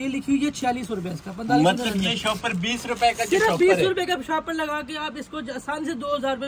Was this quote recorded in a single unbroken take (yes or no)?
yes